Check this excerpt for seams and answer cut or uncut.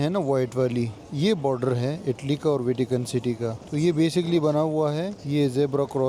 uncut